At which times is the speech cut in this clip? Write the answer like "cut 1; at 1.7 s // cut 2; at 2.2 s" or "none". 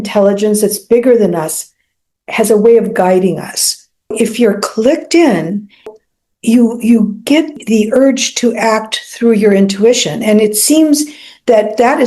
cut 1; at 4.1 s // cut 2; at 5.8 s // cut 3; at 7.5 s

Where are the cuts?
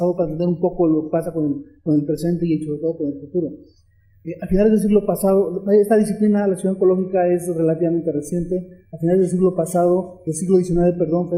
none

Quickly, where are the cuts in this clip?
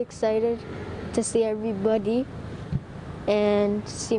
none

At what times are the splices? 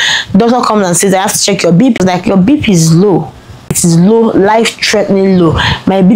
cut 1; at 2.0 s // cut 2; at 3.8 s

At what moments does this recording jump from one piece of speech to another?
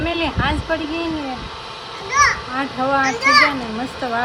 none

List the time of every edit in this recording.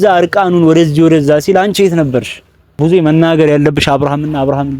cut 1; at 2.6 s

